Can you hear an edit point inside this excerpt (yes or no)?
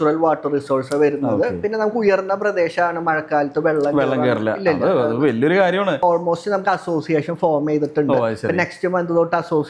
yes